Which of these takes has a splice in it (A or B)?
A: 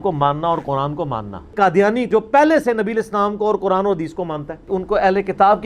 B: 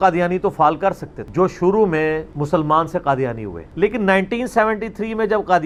A